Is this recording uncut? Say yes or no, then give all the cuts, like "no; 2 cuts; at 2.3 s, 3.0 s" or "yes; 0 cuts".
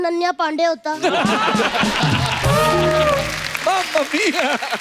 yes; 0 cuts